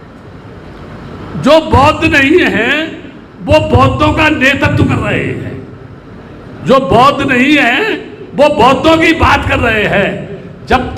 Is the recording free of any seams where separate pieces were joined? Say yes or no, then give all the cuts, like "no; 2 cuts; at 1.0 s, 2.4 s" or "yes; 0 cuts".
yes; 0 cuts